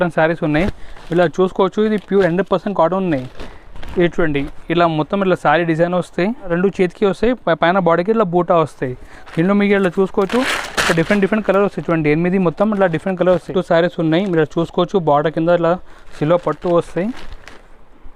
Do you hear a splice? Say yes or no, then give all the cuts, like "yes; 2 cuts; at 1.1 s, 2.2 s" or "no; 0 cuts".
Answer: yes; 2 cuts; at 6.5 s, 13.5 s